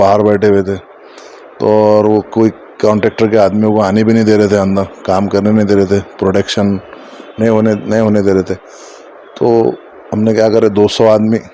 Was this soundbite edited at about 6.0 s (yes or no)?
no